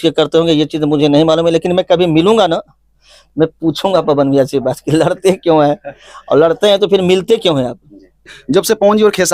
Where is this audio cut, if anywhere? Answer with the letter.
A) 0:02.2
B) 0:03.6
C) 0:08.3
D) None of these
C